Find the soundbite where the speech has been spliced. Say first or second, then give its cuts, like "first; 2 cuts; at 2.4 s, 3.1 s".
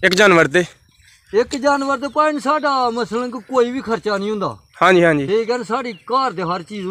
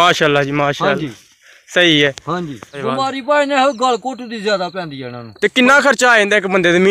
second; 2 cuts; at 2.8 s, 5.2 s